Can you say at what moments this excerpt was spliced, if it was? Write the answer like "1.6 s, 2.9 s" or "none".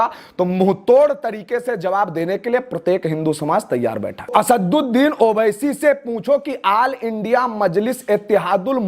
4.3 s